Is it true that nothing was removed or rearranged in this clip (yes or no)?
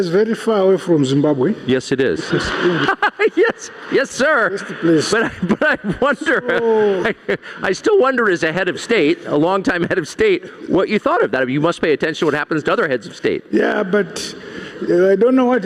yes